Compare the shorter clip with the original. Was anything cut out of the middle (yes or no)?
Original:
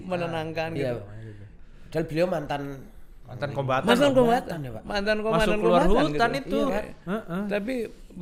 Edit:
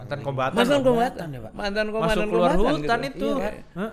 no